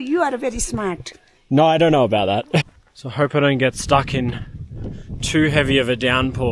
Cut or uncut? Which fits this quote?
cut